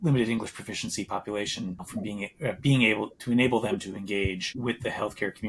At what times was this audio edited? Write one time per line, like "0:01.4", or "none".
none